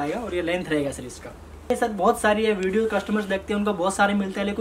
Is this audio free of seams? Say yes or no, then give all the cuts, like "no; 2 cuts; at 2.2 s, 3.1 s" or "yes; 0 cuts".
no; 1 cut; at 1.7 s